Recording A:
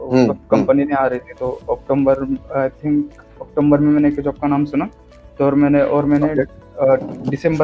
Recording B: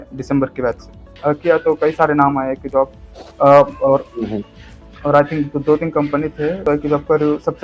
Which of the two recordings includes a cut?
B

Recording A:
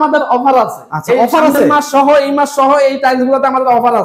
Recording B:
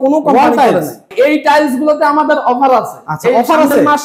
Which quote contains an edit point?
B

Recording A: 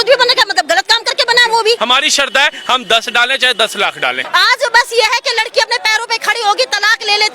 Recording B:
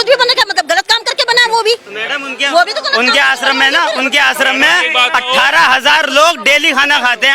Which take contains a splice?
A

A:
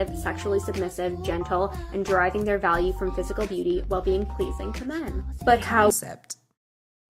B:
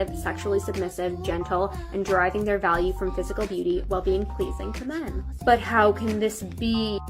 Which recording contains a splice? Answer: B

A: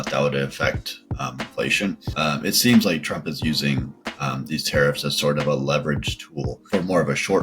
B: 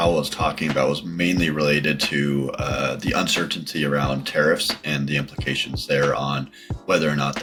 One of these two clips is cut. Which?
A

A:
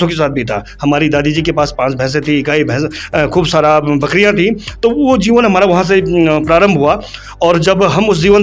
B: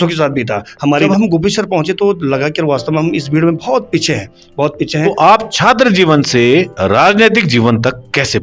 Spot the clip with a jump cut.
B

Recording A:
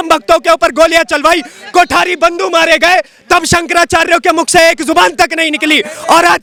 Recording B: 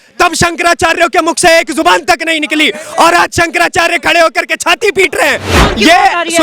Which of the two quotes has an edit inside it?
B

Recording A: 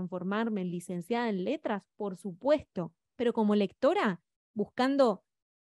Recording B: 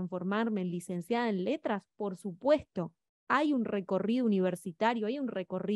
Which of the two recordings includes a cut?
A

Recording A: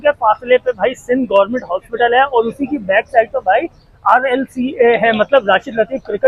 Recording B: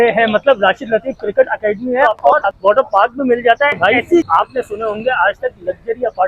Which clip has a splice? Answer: B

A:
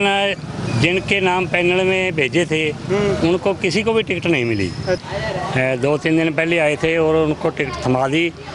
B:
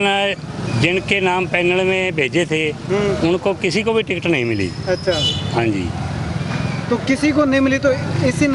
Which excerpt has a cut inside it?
A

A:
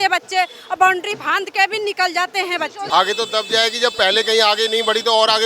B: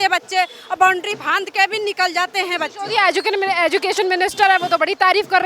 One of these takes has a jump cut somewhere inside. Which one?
A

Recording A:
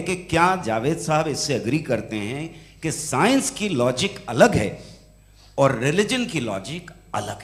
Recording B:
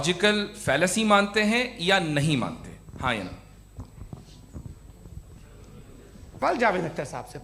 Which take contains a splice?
B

